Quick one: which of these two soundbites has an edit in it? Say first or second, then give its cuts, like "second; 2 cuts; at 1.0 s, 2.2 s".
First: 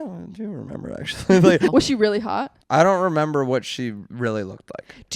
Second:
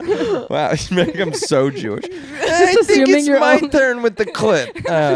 first; 2 cuts; at 1.7 s, 2.6 s